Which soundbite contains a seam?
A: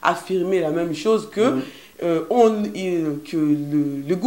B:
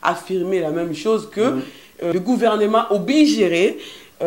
B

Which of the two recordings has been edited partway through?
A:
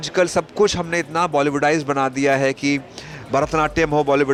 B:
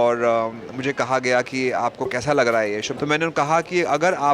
B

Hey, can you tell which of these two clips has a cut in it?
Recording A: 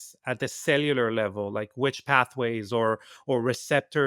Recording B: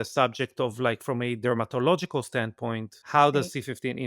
B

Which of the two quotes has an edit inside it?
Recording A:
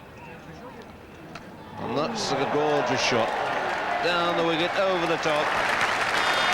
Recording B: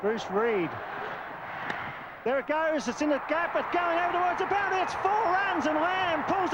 A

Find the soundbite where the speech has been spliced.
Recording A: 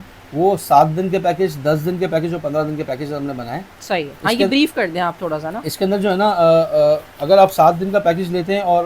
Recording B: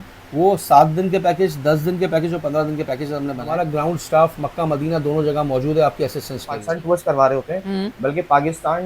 B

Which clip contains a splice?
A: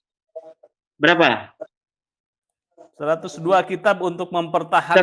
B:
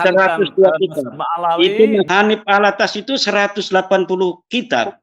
B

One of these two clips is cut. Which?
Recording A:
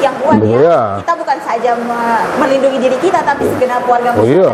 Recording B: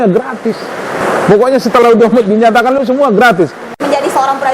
B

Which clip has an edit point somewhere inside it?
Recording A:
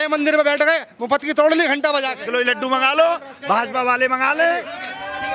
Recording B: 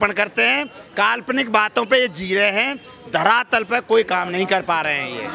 A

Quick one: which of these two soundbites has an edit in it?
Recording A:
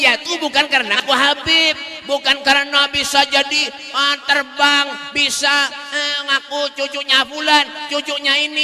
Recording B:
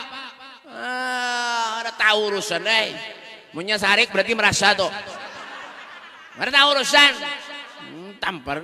A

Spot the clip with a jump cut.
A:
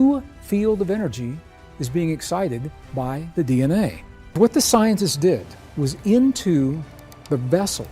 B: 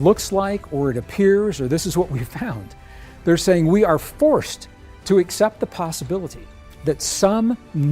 A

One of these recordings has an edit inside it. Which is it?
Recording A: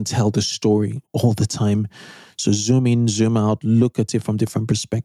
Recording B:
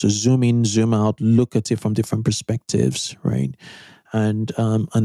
A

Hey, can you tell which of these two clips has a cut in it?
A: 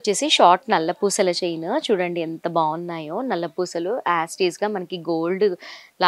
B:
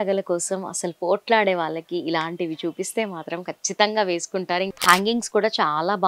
B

